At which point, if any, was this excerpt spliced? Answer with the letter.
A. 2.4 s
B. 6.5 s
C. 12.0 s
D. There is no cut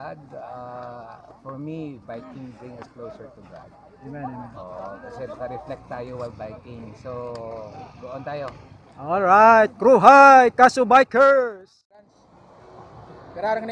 C